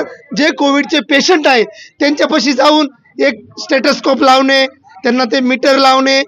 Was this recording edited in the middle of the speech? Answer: no; 0 cuts

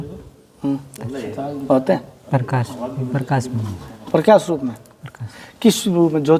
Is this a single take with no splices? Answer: yes; 0 cuts

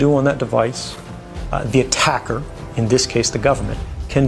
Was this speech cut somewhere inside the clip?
no; 0 cuts

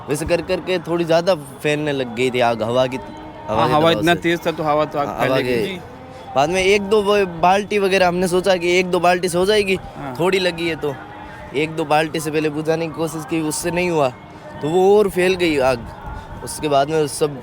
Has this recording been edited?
no; 0 cuts

